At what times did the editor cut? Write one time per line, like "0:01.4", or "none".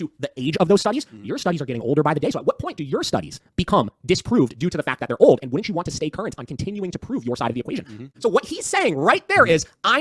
0:08.1